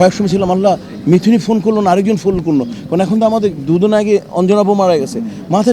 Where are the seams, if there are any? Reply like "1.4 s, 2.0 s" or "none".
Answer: none